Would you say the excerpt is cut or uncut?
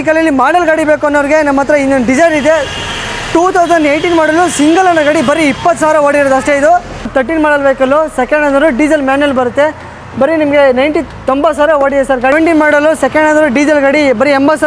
cut